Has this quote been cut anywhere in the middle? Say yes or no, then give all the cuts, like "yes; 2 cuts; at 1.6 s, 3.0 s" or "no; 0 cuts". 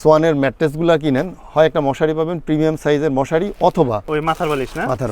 yes; 1 cut; at 4.0 s